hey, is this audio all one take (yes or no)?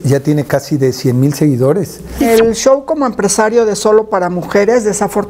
no